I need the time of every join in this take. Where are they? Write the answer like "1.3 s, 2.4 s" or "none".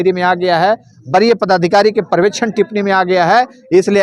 none